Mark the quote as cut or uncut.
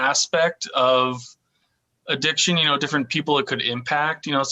uncut